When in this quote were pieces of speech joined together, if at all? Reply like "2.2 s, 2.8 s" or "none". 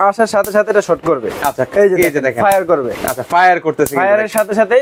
none